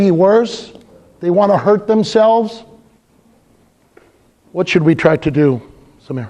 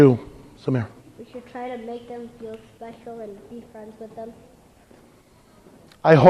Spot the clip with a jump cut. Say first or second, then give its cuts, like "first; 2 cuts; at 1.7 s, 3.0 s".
second; 1 cut; at 2.4 s